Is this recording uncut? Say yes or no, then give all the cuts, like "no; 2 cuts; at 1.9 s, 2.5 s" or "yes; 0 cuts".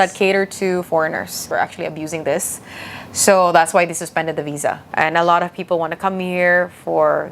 no; 2 cuts; at 1.5 s, 4.8 s